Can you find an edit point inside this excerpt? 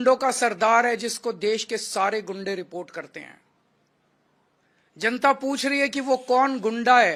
no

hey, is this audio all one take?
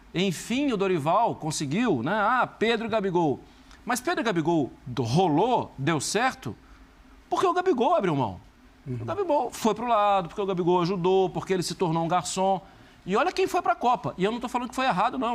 yes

